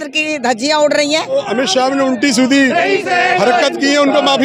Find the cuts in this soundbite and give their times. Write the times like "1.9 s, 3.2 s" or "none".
1.4 s